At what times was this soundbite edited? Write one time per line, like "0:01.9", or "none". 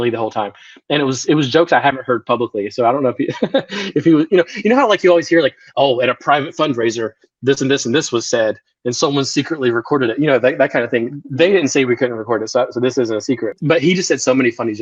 none